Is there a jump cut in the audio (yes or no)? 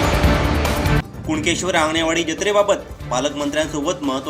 yes